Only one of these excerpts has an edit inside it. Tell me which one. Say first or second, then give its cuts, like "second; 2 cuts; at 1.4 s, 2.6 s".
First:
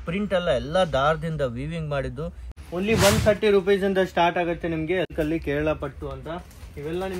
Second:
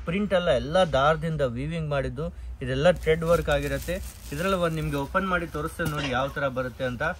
first; 2 cuts; at 2.5 s, 5.1 s